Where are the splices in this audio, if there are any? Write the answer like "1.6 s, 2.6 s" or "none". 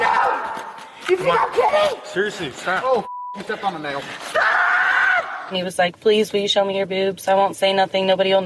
5.4 s